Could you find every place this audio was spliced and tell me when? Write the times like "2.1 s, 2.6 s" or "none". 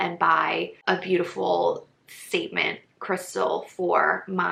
none